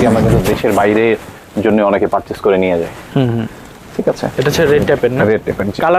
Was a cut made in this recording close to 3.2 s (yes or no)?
no